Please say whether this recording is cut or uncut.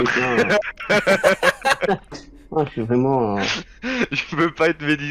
uncut